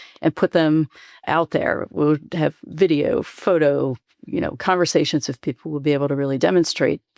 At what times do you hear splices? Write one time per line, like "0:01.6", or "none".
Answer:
0:01.2